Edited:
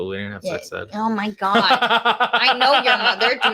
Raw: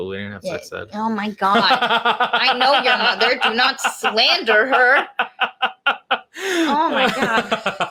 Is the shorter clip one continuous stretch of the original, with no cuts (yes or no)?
yes